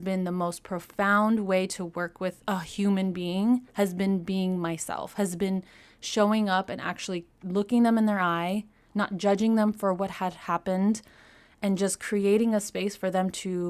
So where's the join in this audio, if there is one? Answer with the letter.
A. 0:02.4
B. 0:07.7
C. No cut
A